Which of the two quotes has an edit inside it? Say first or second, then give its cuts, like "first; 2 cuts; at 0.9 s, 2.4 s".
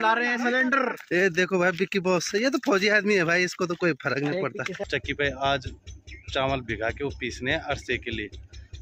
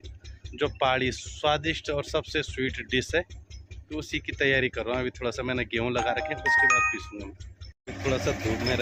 first; 1 cut; at 4.9 s